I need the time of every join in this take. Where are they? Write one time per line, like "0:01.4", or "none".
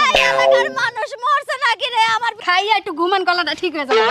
0:02.4